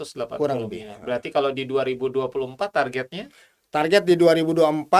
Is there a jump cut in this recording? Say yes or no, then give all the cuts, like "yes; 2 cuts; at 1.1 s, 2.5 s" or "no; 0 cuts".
no; 0 cuts